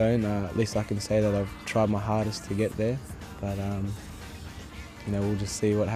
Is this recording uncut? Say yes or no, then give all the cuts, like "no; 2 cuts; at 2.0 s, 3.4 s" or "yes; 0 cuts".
yes; 0 cuts